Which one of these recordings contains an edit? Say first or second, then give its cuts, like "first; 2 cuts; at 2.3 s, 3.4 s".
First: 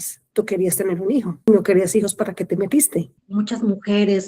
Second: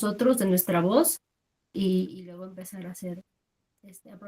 first; 2 cuts; at 1.5 s, 3.2 s